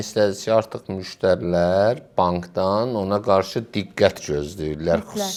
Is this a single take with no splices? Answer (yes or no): yes